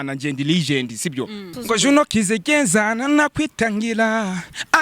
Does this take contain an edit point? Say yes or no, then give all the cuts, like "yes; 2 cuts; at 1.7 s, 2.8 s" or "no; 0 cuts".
yes; 1 cut; at 1.5 s